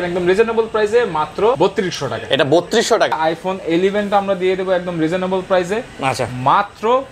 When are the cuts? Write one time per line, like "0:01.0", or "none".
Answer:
0:01.6
0:03.1

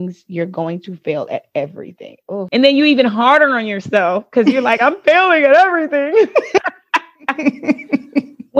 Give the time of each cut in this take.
0:02.5

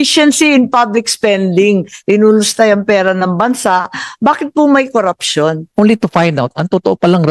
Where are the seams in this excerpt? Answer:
0:05.6

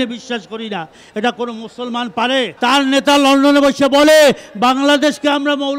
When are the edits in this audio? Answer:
0:02.5

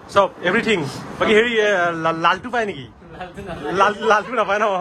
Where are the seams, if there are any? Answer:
none

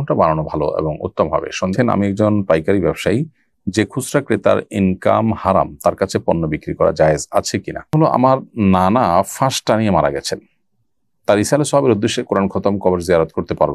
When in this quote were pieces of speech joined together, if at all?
0:01.7
0:07.9

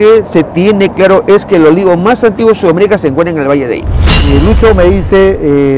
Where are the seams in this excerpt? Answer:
0:04.3

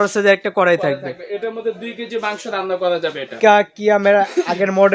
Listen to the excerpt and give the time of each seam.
0:03.3

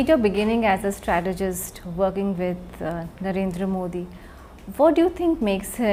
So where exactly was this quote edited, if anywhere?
none

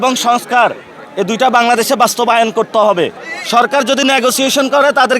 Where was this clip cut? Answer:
0:03.2

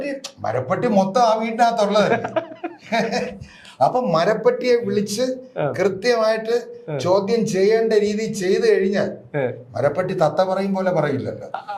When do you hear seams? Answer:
none

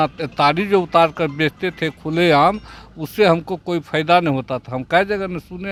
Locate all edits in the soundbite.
none

